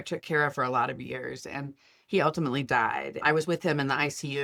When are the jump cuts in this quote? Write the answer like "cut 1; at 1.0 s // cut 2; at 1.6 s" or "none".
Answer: none